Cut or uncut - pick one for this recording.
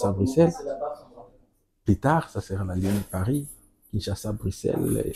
uncut